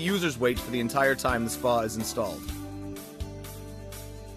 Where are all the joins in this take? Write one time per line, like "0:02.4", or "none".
0:02.4